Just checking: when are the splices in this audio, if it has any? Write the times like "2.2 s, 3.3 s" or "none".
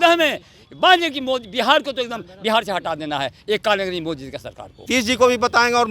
4.9 s